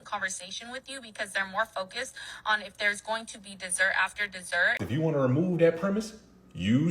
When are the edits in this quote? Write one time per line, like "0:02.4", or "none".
0:04.8